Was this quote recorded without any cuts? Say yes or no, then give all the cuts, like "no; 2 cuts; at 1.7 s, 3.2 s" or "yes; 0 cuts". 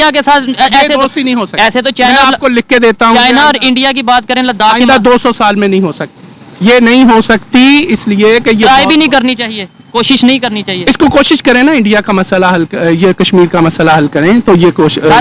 yes; 0 cuts